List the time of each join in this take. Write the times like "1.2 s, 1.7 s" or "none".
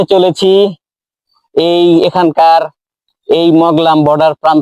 none